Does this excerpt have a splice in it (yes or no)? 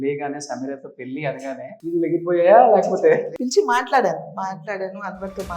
yes